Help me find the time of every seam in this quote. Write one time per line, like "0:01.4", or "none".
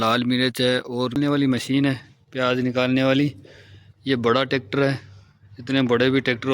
0:01.2